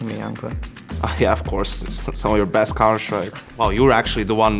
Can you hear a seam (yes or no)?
yes